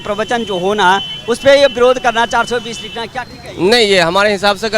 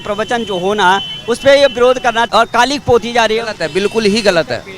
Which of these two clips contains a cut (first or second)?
second